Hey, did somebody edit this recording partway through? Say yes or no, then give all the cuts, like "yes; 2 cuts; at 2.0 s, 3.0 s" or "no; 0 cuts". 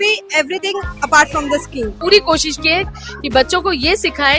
yes; 1 cut; at 1.9 s